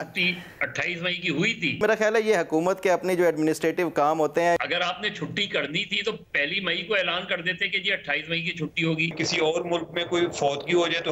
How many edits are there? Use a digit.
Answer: 3